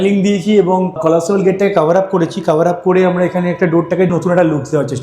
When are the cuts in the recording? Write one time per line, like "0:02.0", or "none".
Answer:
0:01.0
0:04.1